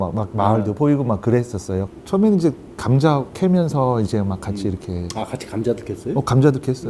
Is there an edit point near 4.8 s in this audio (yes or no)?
no